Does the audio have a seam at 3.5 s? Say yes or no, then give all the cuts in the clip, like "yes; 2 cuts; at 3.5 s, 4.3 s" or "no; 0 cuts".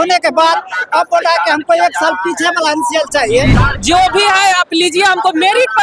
yes; 1 cut; at 3.5 s